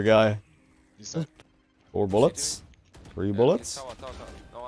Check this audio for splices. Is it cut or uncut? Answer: cut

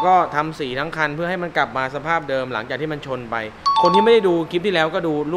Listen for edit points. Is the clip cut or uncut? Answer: uncut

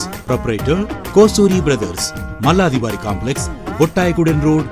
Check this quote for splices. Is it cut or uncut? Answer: uncut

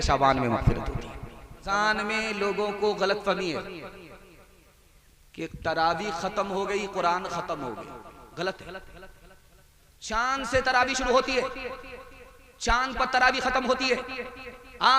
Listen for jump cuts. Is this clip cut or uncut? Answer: cut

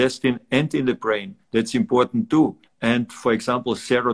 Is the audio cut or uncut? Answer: cut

